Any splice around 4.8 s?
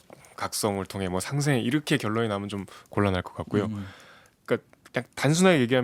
no; 0 cuts

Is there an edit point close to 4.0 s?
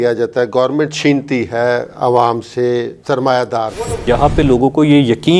yes; 1 cut; at 4.0 s

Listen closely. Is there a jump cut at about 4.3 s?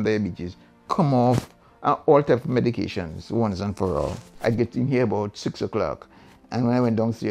yes; 1 cut; at 4.3 s

